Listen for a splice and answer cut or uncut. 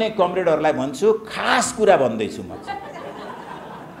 uncut